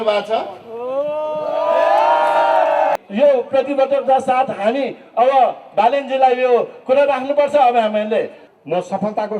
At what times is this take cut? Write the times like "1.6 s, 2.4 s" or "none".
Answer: 3.0 s, 8.4 s